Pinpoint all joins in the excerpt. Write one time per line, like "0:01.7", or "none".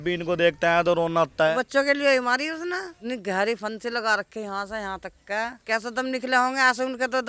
0:01.5
0:02.9
0:05.6